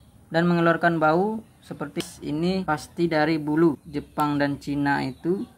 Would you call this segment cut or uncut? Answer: cut